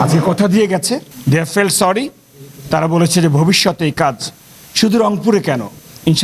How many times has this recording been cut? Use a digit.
1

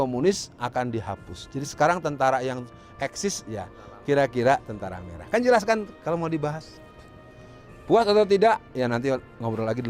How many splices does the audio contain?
0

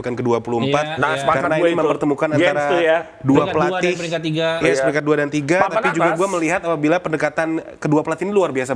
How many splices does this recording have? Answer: 0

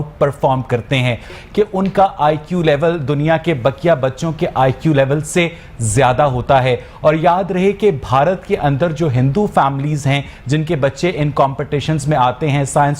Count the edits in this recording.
1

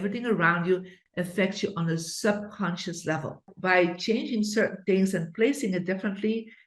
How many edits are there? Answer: 1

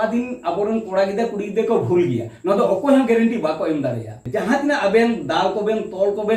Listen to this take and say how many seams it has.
1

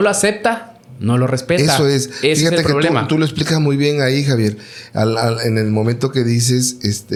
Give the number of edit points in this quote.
0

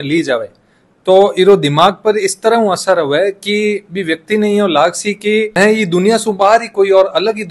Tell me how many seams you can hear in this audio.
0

